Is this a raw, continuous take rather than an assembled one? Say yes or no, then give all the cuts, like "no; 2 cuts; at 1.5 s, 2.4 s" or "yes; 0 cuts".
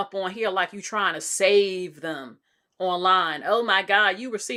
yes; 0 cuts